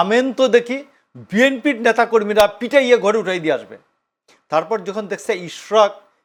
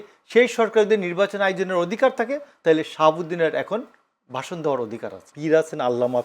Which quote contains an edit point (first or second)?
second